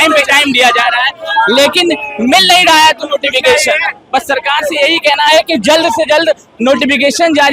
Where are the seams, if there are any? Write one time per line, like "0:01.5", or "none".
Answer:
none